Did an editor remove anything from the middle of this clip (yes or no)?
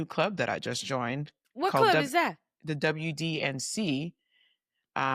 no